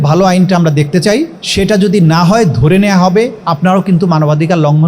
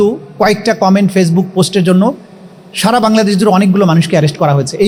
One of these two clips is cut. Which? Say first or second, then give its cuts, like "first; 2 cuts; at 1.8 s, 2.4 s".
first; 2 cuts; at 1.4 s, 3.4 s